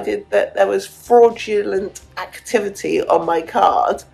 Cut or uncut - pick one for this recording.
uncut